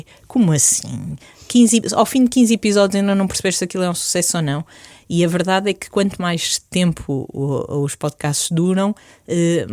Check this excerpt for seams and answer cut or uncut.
uncut